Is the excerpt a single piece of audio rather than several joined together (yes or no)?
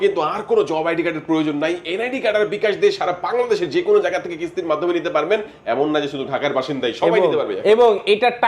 yes